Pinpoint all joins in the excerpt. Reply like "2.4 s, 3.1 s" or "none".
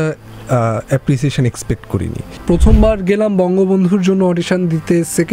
2.2 s

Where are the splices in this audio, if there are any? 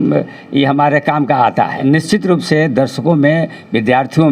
1.8 s

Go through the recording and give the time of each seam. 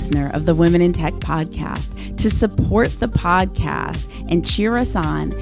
none

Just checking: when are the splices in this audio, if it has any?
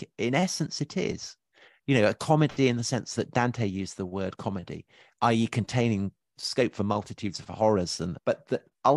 6.4 s, 8.2 s

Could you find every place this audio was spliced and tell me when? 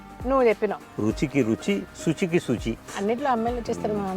2.8 s

